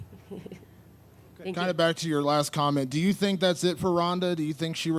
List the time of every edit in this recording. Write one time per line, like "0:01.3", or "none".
0:01.6